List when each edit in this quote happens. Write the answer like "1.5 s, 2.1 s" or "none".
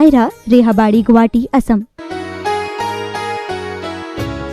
2.0 s